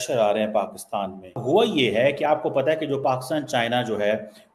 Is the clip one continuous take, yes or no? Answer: no